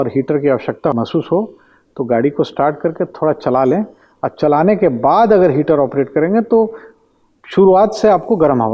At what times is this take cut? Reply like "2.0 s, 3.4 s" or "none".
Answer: 0.9 s